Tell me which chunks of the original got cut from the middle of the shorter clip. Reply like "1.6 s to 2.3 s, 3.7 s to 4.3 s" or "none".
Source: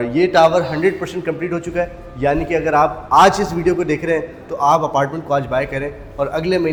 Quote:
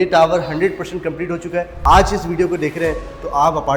2.0 s to 3.0 s